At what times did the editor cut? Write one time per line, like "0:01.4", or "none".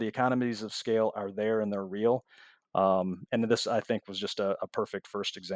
none